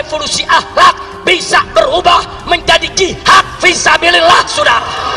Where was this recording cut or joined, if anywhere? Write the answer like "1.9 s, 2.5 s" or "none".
none